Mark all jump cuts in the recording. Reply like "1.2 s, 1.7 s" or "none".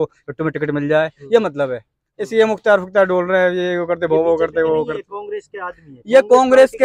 none